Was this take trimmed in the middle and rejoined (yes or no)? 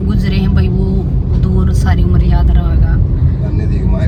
no